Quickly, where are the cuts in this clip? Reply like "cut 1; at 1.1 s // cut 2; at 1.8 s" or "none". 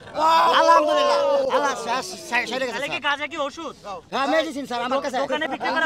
none